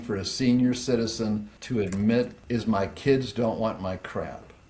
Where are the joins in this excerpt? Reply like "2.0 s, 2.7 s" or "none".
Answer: 1.5 s, 2.4 s